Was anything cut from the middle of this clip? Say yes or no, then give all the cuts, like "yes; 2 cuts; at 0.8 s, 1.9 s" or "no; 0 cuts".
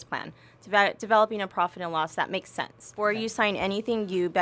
yes; 1 cut; at 2.8 s